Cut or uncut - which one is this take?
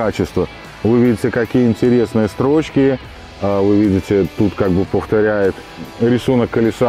cut